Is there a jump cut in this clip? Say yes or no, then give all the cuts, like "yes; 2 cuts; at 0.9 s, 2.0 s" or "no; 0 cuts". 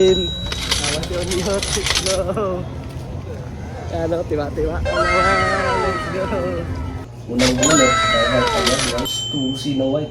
yes; 2 cuts; at 7.1 s, 9.2 s